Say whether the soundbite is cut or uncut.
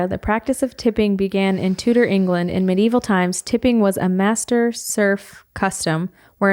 uncut